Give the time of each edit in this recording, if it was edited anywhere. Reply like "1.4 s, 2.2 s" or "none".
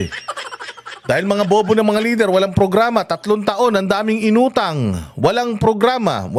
none